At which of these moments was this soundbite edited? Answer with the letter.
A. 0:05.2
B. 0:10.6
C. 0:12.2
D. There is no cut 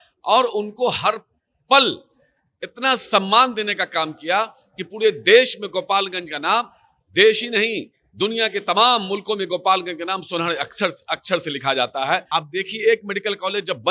C